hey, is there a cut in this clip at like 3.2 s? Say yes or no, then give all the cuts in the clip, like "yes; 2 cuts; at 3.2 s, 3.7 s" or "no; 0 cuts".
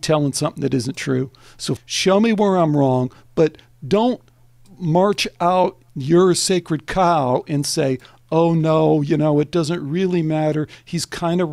no; 2 cuts; at 1.8 s, 5.9 s